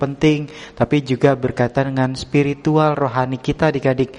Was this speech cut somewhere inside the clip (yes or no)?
no